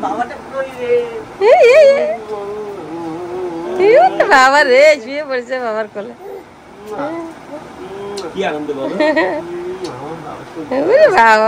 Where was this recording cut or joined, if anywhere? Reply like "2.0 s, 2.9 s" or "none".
none